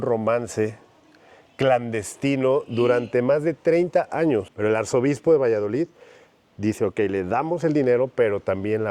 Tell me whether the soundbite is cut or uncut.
cut